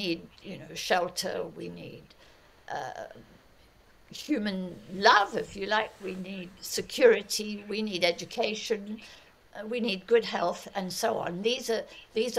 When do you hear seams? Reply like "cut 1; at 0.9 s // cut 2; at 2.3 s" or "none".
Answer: none